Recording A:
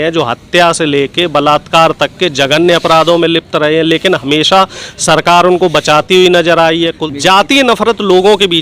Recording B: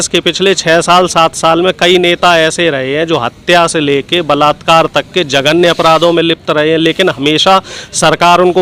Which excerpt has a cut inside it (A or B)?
A